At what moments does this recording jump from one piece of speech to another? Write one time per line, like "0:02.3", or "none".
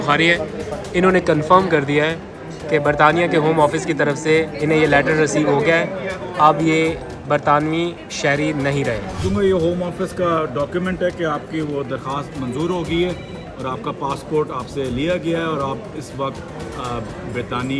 0:09.2